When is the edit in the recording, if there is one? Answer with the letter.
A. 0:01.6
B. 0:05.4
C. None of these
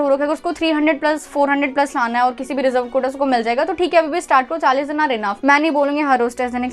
B